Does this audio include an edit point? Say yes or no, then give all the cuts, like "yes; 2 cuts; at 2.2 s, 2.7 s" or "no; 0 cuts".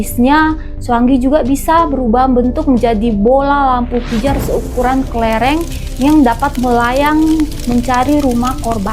no; 0 cuts